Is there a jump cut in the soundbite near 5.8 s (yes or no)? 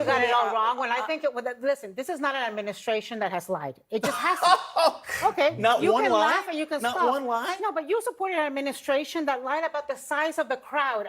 no